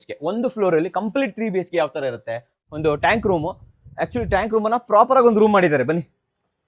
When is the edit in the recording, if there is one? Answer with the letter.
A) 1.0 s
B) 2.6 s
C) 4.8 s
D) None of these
B